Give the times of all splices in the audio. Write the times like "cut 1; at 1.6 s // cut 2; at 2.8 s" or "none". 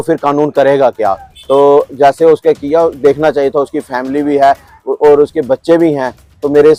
none